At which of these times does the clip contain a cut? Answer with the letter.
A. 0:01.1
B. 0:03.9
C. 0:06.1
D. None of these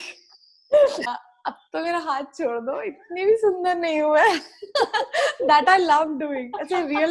A